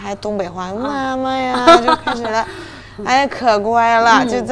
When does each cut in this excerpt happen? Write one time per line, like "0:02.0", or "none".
none